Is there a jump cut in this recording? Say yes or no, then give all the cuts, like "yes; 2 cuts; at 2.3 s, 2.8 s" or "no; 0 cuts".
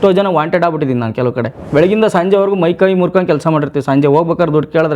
yes; 1 cut; at 1.6 s